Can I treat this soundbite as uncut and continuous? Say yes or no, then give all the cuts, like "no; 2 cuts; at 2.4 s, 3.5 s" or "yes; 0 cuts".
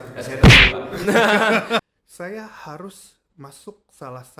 no; 1 cut; at 1.8 s